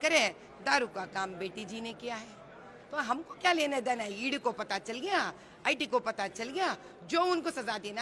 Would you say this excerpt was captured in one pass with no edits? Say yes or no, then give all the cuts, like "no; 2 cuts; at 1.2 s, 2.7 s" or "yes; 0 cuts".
yes; 0 cuts